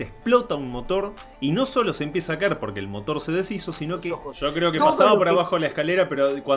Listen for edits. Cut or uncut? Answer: cut